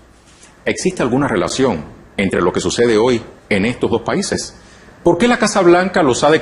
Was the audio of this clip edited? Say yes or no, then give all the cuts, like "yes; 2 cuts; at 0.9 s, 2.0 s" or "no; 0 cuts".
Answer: yes; 1 cut; at 1.7 s